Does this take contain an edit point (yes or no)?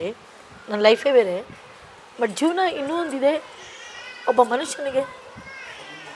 no